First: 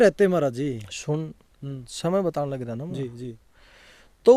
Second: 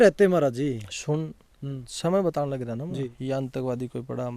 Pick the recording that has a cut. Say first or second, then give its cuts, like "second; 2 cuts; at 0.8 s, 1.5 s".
second; 1 cut; at 3.2 s